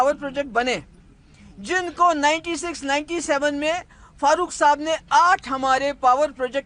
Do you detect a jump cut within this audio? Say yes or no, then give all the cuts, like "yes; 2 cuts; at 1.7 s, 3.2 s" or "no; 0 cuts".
no; 0 cuts